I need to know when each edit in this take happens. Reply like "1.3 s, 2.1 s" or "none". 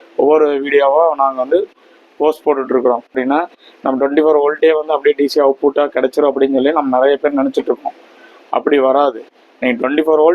3.2 s